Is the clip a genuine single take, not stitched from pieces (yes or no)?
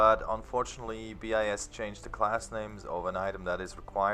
no